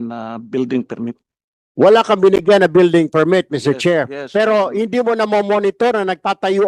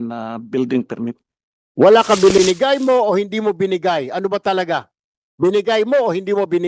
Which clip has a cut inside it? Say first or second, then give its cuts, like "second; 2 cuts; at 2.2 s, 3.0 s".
second; 1 cut; at 2.4 s